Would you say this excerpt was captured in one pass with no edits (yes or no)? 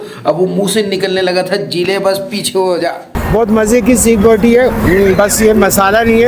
no